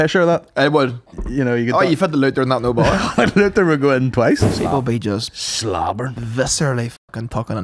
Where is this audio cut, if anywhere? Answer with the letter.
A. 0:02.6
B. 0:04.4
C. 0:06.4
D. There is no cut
B